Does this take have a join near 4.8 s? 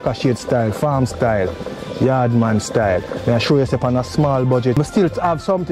yes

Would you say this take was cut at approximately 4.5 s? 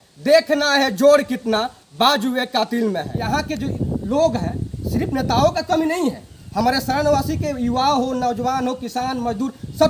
no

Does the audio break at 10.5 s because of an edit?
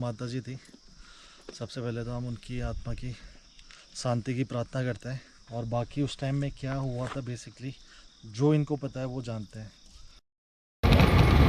yes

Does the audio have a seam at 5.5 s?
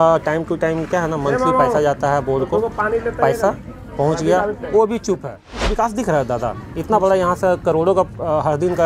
yes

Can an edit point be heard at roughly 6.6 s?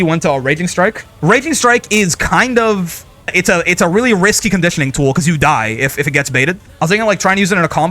yes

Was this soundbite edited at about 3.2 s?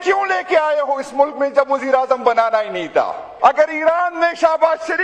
yes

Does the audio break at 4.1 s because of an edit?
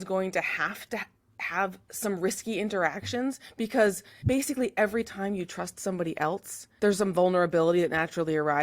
yes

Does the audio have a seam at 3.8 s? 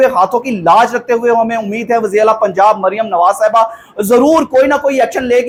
no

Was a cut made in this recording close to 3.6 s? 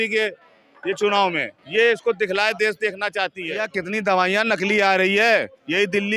yes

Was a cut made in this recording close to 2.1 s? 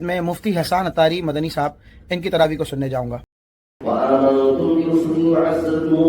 no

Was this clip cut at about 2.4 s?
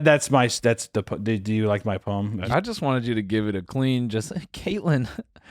yes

